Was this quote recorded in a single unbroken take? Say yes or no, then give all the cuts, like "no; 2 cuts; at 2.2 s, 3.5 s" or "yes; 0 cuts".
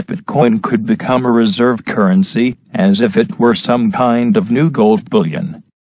yes; 0 cuts